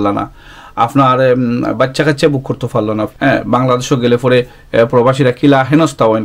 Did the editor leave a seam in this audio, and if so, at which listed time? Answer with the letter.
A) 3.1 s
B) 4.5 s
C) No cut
A